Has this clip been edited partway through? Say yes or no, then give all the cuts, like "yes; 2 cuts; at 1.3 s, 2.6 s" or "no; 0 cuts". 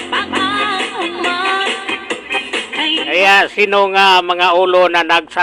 no; 0 cuts